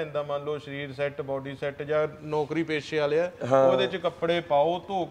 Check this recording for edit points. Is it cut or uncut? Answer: uncut